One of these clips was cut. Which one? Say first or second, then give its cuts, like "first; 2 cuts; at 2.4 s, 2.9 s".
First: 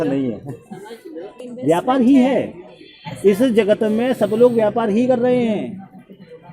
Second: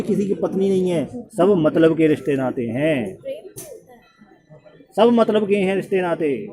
first; 1 cut; at 1.4 s